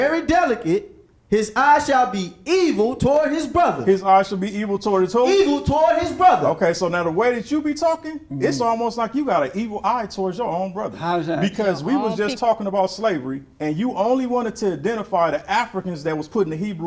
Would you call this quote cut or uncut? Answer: uncut